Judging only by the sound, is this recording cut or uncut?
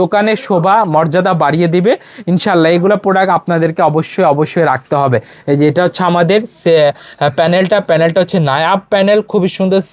uncut